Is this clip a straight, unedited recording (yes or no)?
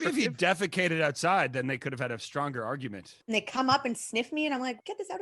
no